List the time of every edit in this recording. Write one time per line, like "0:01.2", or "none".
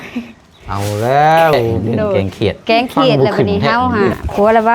0:01.8